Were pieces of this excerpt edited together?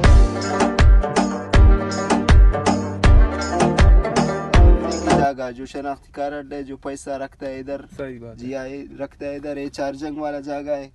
yes; 1 cut; at 5.2 s

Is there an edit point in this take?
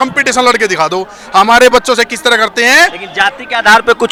no; 0 cuts

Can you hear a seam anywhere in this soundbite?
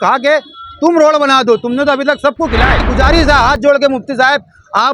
yes; 1 cut; at 2.9 s

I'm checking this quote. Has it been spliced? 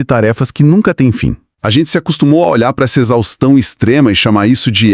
yes; 1 cut; at 1.5 s

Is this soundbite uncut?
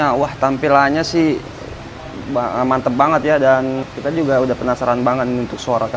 no; 1 cut; at 3.9 s

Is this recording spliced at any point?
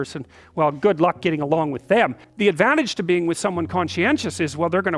yes; 1 cut; at 2.2 s

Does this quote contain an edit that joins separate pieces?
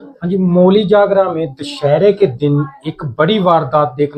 no; 0 cuts

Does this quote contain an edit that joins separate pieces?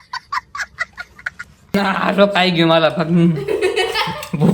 yes; 1 cut; at 1.7 s

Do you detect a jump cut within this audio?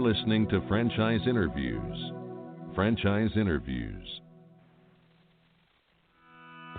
yes; 1 cut; at 5.7 s

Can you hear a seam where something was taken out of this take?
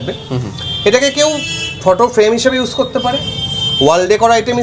no; 0 cuts

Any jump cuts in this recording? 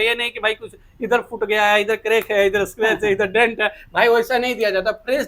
no; 0 cuts

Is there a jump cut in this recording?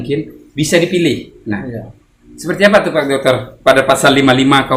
no; 0 cuts

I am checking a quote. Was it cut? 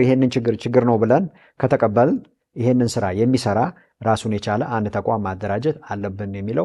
no; 0 cuts

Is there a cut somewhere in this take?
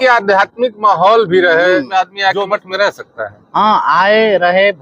yes; 1 cut; at 1.9 s

